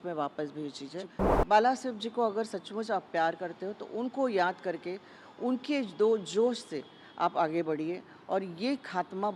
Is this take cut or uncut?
cut